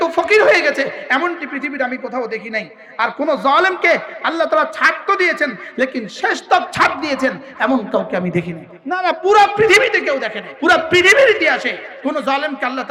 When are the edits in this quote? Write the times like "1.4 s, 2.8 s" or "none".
none